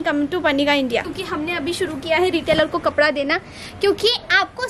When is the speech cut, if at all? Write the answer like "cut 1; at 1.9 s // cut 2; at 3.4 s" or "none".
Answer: cut 1; at 1.1 s